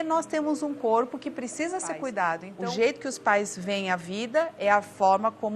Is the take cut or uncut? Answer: cut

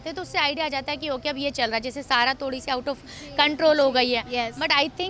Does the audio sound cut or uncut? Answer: uncut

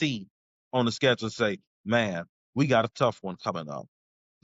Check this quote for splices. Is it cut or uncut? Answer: uncut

